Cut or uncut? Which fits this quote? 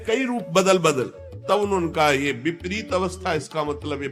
uncut